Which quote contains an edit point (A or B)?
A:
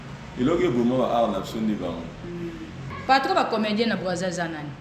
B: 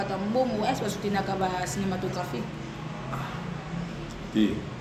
A